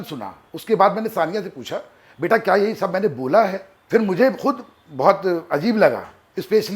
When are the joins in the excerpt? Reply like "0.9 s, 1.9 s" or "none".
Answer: 3.7 s

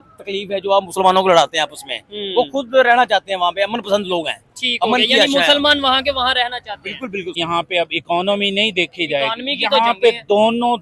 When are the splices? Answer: 7.4 s

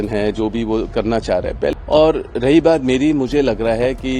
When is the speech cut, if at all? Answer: 1.7 s

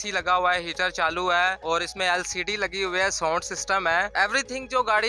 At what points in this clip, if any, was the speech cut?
1.6 s, 4.1 s

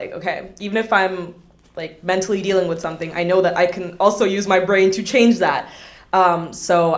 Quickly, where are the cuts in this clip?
none

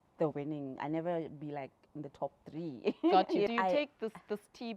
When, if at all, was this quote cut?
3.5 s

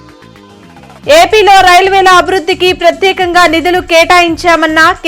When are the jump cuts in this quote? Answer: none

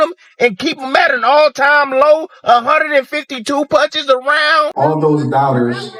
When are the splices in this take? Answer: 4.7 s

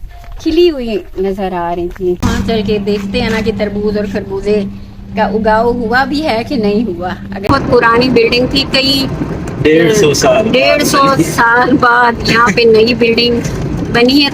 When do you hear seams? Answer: 2.2 s, 7.5 s

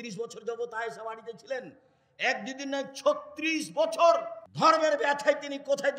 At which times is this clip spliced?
4.4 s

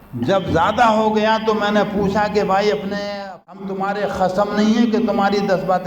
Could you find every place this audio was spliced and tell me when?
3.1 s

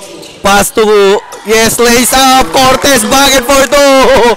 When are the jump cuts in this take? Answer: none

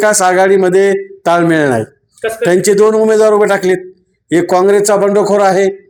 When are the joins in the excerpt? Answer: none

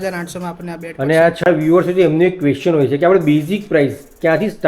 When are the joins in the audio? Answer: 1.4 s

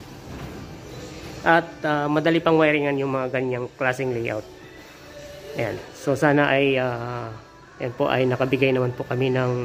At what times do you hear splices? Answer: none

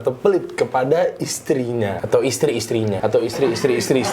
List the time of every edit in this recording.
2.0 s, 3.0 s

